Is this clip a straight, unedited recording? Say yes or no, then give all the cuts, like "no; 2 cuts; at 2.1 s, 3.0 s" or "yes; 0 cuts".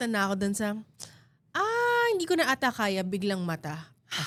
yes; 0 cuts